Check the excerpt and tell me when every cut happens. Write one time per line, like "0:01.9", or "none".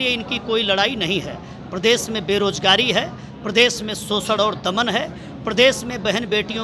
none